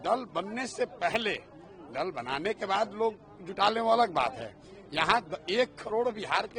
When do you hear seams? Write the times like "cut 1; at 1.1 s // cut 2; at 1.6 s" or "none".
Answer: none